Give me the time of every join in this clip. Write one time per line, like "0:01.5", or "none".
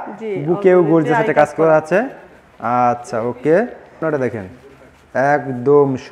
0:04.0

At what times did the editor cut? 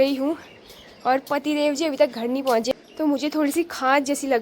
0:02.7

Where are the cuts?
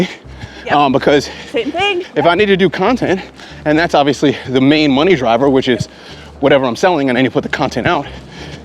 0:02.0

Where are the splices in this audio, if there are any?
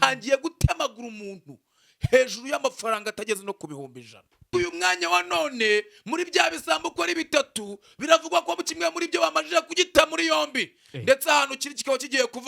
0:04.5

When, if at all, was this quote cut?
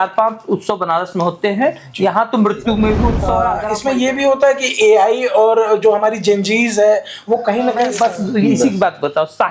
0:03.6
0:07.9

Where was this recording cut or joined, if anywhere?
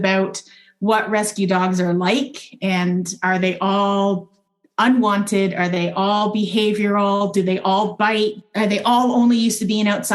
0:08.4

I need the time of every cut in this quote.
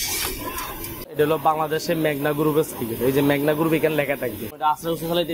0:01.1
0:04.5

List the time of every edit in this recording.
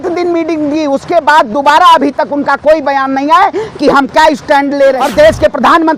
0:05.0

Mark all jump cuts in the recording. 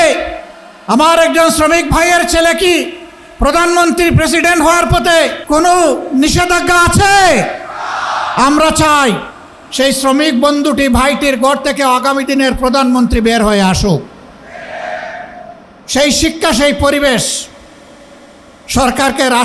0:05.4

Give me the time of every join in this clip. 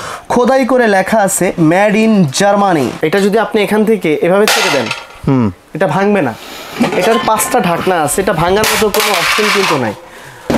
0:02.9

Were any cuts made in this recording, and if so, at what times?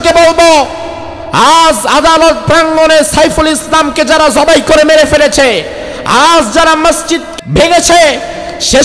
0:07.3

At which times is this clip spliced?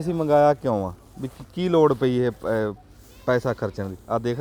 none

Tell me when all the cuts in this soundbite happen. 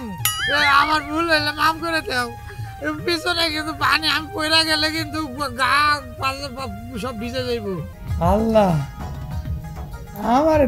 0:08.0

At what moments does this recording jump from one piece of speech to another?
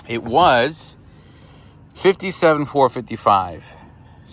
none

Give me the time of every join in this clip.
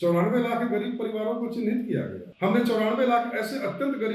0:02.2

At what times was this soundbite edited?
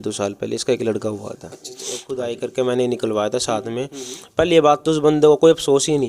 0:01.9

